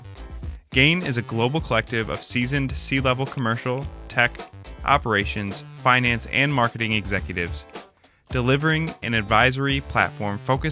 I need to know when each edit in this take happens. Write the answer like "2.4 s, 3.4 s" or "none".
none